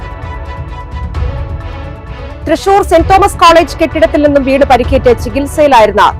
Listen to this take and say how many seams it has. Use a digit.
1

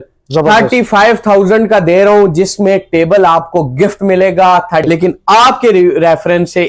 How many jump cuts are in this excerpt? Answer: 1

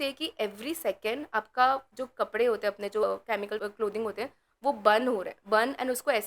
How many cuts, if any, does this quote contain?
1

